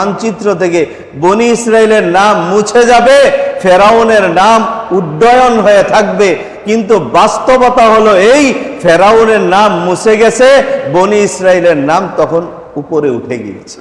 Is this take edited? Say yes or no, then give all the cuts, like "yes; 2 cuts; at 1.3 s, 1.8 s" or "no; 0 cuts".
no; 0 cuts